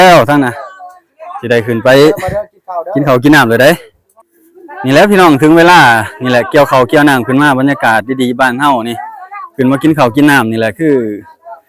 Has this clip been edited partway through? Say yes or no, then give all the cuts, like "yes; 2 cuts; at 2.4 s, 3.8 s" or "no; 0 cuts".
no; 0 cuts